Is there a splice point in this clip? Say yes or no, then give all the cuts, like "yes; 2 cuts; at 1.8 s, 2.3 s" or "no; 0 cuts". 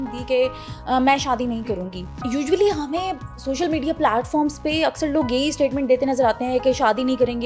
yes; 1 cut; at 2.1 s